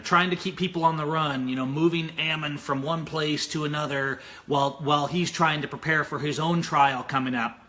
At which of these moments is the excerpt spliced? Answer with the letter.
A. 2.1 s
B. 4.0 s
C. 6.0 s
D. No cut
A